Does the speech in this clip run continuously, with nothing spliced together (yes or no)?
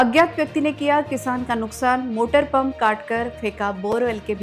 yes